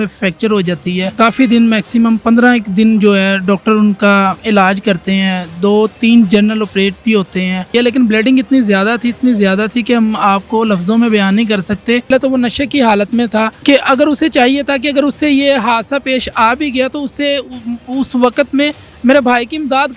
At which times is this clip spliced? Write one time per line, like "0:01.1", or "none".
0:01.1
0:07.7
0:12.1
0:13.5